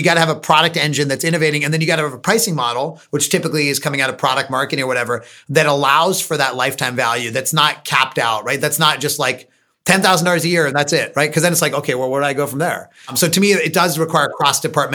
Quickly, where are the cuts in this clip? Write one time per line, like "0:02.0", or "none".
0:13.1